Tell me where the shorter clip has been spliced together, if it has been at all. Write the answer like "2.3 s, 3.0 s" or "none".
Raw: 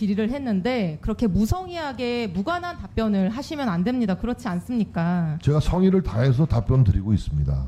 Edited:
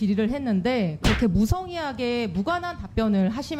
none